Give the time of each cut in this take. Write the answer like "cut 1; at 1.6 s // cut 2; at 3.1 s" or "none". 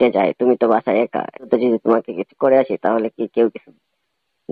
cut 1; at 1.4 s